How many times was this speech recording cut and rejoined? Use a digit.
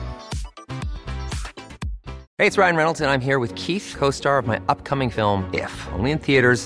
1